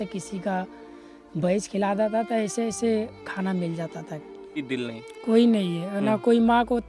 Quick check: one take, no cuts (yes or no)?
no